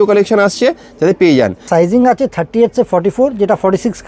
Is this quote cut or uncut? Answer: cut